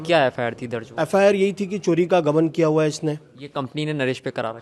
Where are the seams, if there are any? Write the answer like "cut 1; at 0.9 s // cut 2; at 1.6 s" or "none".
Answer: none